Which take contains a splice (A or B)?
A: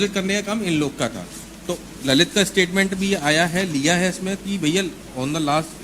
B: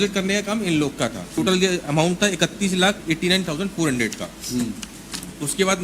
B